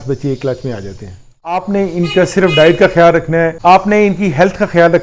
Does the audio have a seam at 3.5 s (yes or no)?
yes